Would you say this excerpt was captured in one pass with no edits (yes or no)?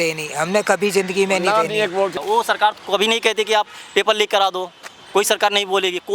no